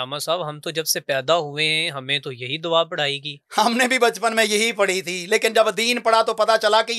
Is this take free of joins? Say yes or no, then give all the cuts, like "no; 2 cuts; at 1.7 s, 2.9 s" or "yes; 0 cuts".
yes; 0 cuts